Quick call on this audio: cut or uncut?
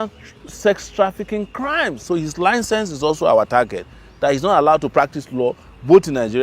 cut